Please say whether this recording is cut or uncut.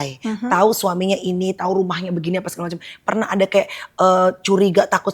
uncut